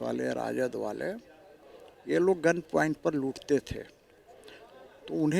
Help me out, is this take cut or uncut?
uncut